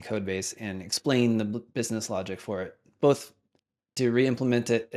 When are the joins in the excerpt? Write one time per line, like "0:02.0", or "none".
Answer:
none